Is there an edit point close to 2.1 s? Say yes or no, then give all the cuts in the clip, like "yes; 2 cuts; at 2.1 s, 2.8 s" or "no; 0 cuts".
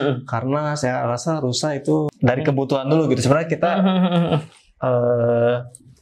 yes; 1 cut; at 2.1 s